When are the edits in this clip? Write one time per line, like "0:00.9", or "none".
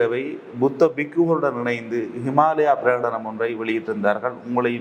none